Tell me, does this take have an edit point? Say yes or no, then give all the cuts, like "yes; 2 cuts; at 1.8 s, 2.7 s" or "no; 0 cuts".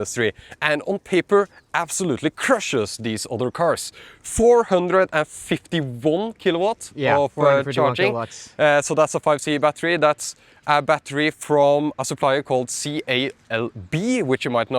no; 0 cuts